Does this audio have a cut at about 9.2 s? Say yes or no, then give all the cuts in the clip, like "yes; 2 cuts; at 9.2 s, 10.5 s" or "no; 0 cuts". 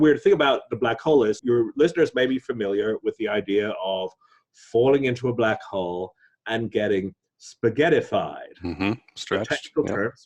no; 1 cut; at 1.4 s